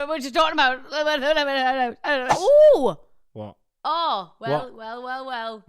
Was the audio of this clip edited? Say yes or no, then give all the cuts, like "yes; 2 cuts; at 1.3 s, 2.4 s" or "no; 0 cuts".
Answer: yes; 1 cut; at 2.3 s